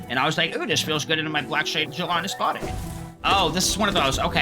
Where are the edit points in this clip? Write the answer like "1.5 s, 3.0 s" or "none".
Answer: 3.1 s

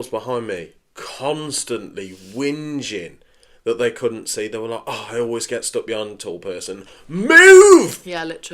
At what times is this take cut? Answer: none

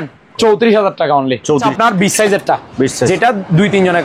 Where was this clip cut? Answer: 1.7 s

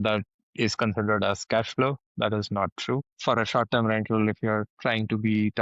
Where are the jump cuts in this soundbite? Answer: 3.1 s

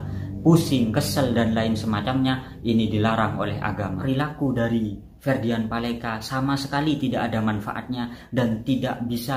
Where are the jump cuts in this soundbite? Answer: 4.0 s

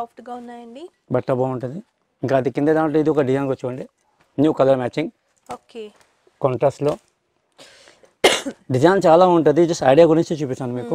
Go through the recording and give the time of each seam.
none

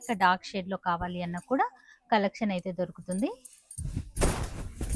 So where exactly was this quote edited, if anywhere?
none

